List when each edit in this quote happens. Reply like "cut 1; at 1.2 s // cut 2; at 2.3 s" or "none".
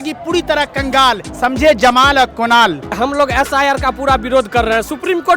cut 1; at 1.3 s // cut 2; at 2.9 s